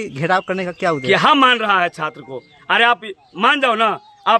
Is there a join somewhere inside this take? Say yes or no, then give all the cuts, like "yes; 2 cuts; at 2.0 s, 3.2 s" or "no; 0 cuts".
no; 0 cuts